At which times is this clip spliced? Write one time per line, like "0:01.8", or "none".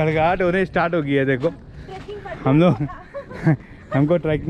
none

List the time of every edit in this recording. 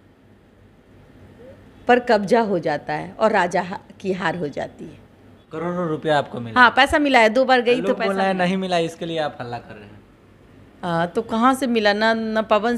none

